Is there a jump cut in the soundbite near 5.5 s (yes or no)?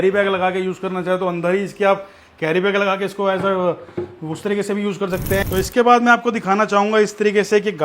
yes